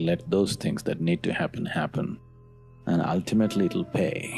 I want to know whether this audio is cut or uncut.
cut